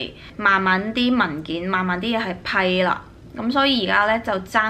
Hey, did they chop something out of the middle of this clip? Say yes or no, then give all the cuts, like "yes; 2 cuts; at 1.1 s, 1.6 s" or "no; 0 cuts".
no; 0 cuts